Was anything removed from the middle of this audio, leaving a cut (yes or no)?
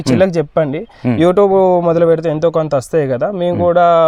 no